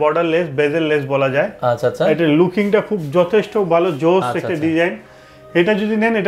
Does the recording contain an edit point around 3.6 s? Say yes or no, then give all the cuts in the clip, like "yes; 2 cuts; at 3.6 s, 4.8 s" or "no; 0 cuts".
no; 0 cuts